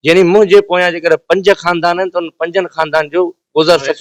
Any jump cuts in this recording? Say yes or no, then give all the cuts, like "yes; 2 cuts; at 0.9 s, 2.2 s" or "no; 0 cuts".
no; 0 cuts